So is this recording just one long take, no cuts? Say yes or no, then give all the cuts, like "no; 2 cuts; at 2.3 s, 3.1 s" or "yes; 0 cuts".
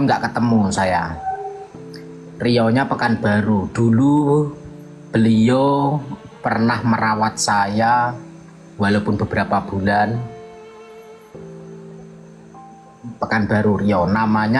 no; 2 cuts; at 10.2 s, 13.1 s